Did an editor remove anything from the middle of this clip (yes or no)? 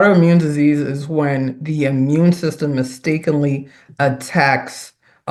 no